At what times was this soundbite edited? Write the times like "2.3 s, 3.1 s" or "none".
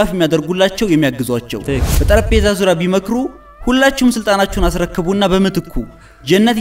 1.8 s